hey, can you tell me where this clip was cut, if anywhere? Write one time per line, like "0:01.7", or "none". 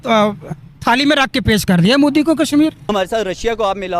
0:02.8